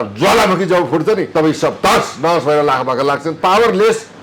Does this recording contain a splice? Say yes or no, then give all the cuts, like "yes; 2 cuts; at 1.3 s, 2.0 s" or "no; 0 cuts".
yes; 2 cuts; at 1.3 s, 3.4 s